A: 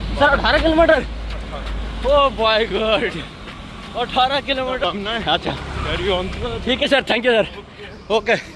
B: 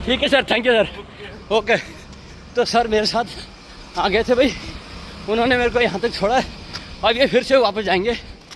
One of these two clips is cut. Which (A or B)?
A